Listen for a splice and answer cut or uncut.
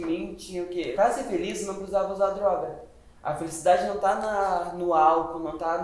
cut